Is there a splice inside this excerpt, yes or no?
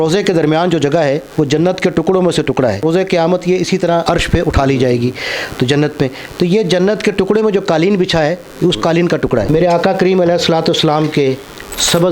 yes